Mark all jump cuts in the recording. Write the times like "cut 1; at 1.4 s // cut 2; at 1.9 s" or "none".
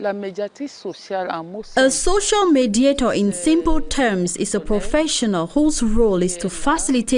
cut 1; at 1.6 s